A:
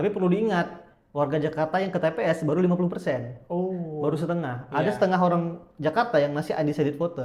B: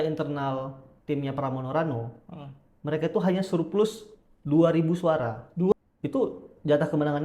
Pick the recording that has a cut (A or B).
B